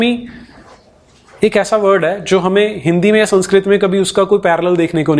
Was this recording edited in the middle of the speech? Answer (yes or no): no